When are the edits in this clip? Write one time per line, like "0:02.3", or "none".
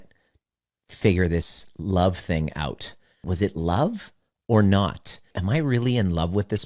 0:03.2
0:05.3